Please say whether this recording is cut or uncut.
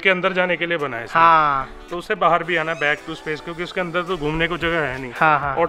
uncut